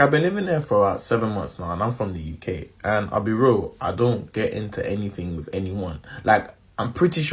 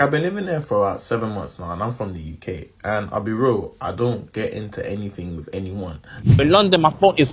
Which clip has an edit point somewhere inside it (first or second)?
second